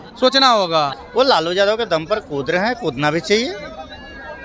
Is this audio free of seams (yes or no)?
no